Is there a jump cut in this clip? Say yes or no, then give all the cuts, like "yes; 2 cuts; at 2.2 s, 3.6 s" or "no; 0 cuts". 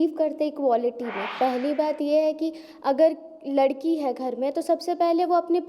yes; 1 cut; at 1.2 s